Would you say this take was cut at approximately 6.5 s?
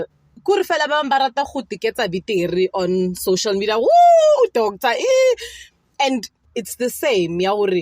yes; 1 cut; at 6.5 s

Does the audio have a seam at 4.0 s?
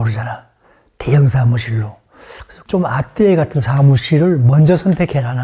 no; 1 cut; at 2.6 s

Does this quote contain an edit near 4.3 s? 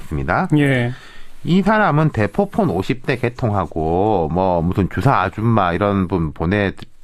no; 1 cut; at 1.4 s

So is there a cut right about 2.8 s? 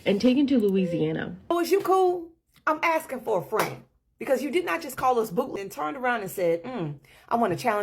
no; 2 cuts; at 1.5 s, 5.5 s

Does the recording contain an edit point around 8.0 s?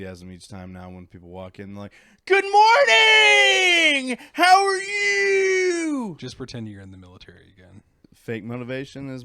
yes; 1 cut; at 8.0 s

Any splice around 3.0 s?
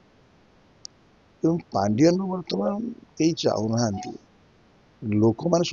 no; 0 cuts

